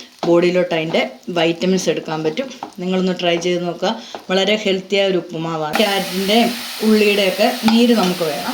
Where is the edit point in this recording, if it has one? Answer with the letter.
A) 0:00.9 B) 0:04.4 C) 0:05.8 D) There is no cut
C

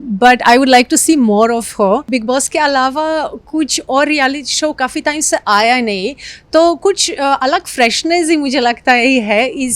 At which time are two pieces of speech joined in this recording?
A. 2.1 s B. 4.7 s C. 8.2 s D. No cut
A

